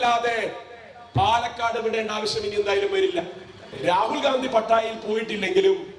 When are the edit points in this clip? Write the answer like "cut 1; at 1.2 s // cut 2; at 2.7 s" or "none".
cut 1; at 3.7 s